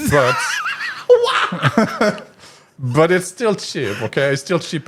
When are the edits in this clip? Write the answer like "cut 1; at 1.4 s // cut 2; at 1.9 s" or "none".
none